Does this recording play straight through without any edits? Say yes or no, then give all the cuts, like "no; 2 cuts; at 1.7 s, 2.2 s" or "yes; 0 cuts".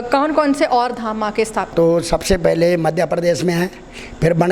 no; 1 cut; at 1.7 s